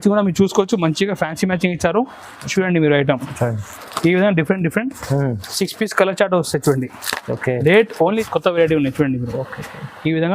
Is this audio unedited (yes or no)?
no